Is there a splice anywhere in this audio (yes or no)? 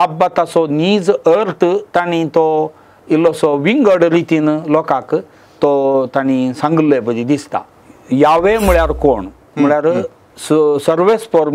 yes